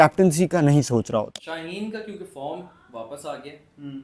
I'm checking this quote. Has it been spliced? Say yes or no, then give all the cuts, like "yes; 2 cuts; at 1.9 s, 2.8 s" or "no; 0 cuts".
yes; 1 cut; at 1.3 s